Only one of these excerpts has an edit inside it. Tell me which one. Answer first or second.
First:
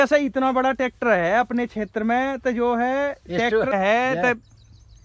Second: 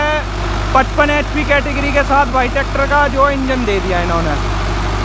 first